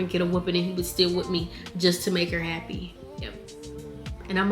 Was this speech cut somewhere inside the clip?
no; 0 cuts

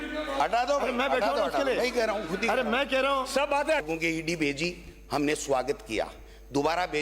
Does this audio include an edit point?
yes; 1 cut; at 3.8 s

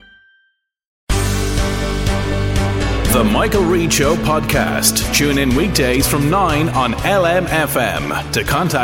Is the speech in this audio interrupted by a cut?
yes; 1 cut; at 1.1 s

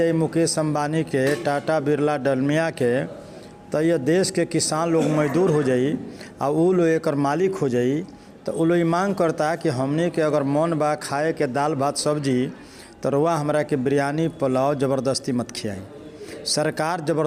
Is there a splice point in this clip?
no; 0 cuts

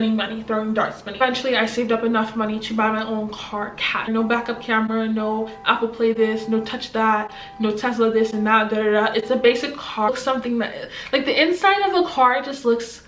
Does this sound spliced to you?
yes; 3 cuts; at 1.2 s, 4.1 s, 10.1 s

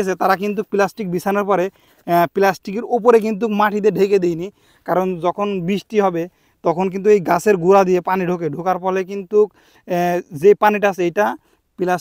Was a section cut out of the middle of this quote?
no; 0 cuts

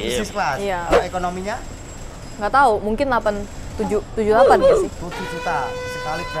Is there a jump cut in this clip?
no; 0 cuts

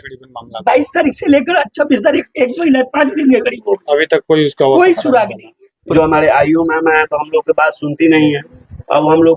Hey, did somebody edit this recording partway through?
yes; 1 cut; at 5.9 s

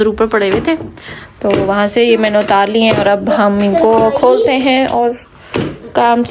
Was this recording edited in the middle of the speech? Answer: no; 0 cuts

